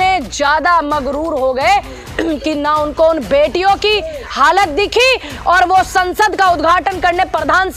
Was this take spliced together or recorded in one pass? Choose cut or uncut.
uncut